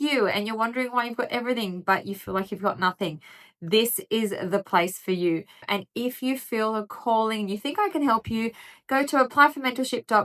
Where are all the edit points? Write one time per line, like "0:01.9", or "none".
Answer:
0:05.6